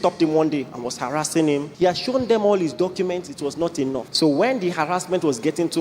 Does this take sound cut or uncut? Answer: cut